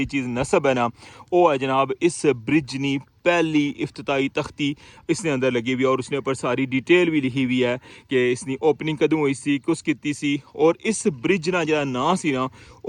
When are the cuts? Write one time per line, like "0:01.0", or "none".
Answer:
none